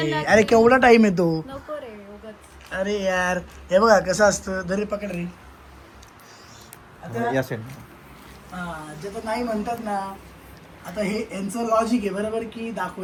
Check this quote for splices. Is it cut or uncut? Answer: uncut